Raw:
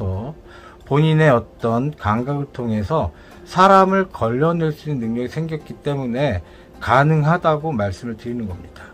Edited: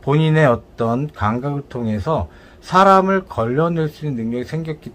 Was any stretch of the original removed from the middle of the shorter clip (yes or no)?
no